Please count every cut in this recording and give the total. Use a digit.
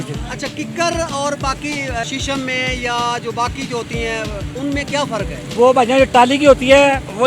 3